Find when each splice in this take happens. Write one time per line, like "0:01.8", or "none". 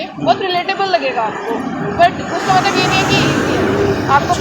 none